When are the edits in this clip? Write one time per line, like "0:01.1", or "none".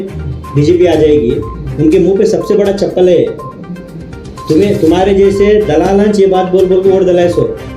none